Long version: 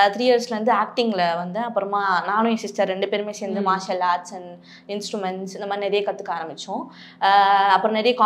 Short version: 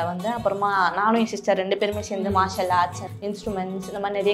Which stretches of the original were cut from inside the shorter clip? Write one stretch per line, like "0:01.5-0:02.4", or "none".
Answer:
0:04.4-0:04.7